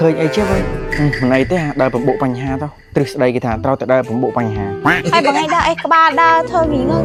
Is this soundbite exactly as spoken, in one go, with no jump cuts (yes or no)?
yes